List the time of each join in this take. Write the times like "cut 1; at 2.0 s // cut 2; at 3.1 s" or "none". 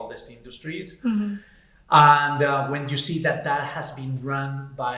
none